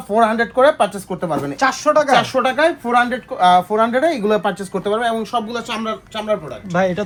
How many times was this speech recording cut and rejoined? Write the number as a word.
zero